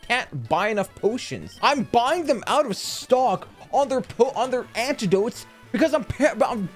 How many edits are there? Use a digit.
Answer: 1